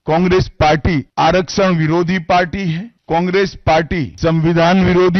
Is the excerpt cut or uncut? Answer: cut